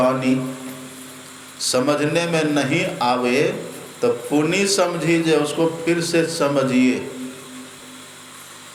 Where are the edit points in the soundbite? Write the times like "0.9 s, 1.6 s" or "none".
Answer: none